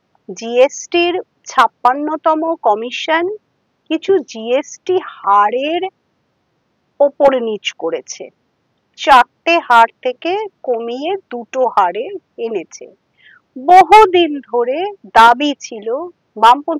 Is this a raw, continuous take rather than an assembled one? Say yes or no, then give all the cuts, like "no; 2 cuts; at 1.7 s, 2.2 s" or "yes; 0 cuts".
yes; 0 cuts